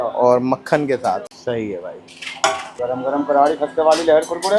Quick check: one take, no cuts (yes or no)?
no